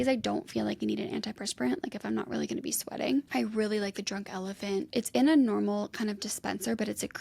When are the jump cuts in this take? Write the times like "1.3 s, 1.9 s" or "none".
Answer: 3.3 s, 4.9 s